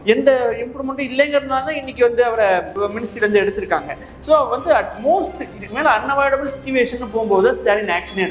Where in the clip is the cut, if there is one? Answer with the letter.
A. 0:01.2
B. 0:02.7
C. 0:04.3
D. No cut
B